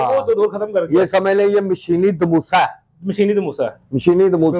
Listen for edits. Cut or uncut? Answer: uncut